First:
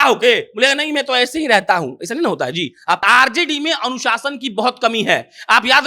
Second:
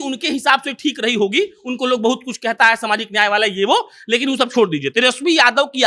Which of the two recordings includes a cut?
first; 1 cut; at 3.0 s

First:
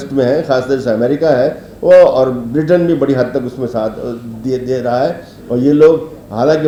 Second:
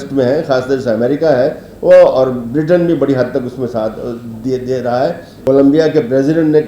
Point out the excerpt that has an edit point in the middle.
second; 1 cut; at 5.3 s

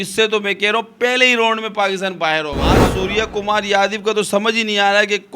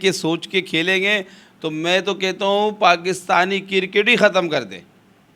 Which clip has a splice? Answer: first; 1 cut; at 2.9 s

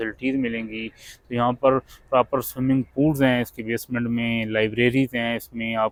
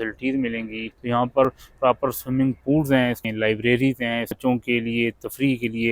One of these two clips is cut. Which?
second; 3 cuts; at 1.4 s, 3.3 s, 4.4 s

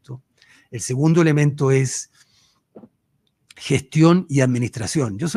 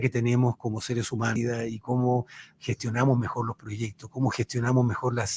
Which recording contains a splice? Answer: second; 1 cut; at 1.4 s

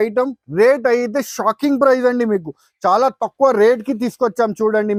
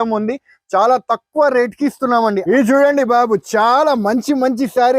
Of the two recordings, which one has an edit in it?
second; 1 cut; at 2.4 s

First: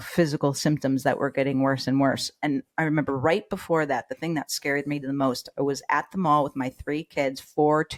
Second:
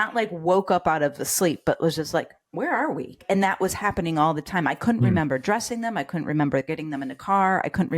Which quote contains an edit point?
second; 2 cuts; at 2.4 s, 3.2 s

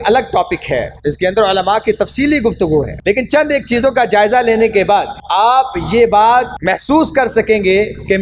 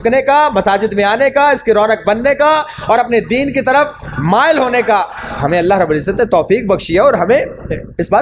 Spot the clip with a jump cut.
first; 4 cuts; at 0.9 s, 2.9 s, 5.2 s, 6.5 s

